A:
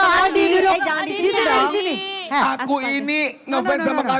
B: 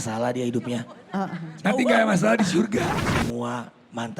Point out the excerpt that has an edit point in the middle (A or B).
B